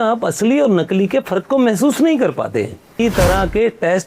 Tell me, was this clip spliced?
yes; 1 cut; at 3.0 s

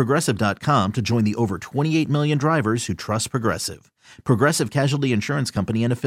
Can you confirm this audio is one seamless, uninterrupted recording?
yes; 0 cuts

